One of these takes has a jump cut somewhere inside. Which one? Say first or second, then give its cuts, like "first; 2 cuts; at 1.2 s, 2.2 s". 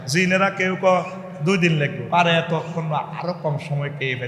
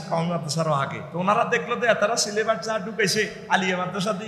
second; 2 cuts; at 1.0 s, 3.4 s